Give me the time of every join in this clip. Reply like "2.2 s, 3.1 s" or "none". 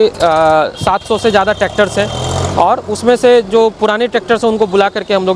none